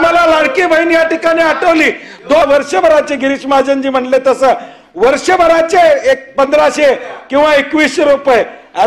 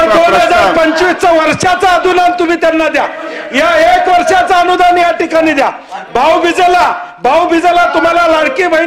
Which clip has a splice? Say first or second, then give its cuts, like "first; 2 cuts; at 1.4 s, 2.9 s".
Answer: first; 1 cut; at 2.4 s